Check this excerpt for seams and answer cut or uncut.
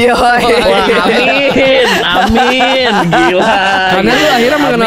uncut